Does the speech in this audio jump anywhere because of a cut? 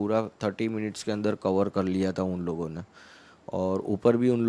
no; 0 cuts

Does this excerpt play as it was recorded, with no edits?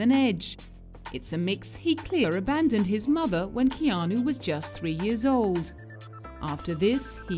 yes; 0 cuts

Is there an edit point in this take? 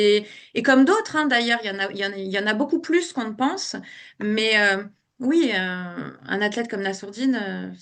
no; 0 cuts

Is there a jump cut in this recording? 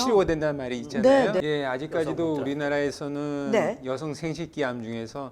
yes; 1 cut; at 1.4 s

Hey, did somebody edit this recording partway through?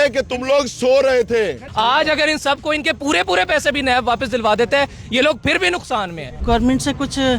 yes; 2 cuts; at 1.6 s, 6.3 s

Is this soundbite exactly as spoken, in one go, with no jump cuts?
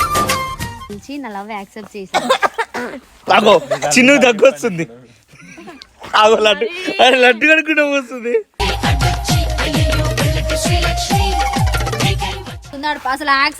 no; 2 cuts; at 0.9 s, 12.6 s

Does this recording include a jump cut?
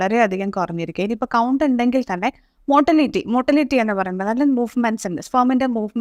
no; 0 cuts

